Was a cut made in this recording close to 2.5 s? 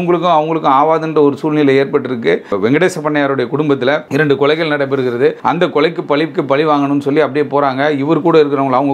yes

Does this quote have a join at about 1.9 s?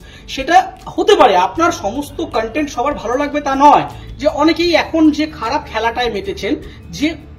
no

